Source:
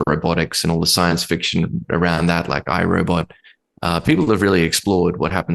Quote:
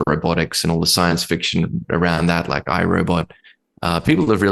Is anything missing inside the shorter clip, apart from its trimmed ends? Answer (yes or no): no